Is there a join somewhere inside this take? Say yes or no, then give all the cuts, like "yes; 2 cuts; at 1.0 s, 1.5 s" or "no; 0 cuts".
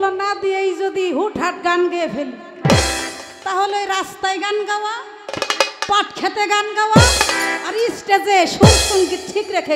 no; 0 cuts